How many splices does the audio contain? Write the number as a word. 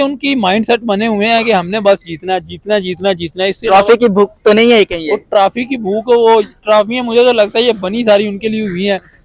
zero